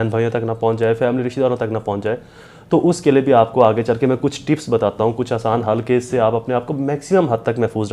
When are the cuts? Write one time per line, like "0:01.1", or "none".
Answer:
none